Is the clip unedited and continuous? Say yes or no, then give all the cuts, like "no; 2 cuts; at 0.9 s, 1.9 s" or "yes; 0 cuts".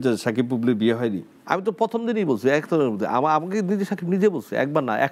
yes; 0 cuts